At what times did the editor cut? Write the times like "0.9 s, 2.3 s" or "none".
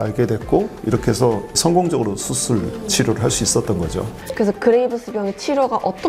4.1 s